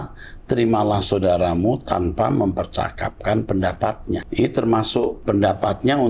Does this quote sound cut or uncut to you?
cut